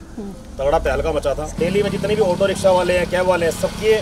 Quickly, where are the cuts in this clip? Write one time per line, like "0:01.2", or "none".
0:01.5